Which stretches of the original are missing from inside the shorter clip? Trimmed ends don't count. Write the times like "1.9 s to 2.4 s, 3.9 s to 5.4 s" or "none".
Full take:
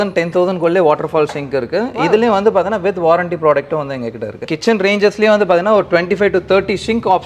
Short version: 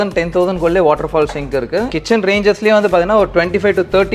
1.9 s to 4.5 s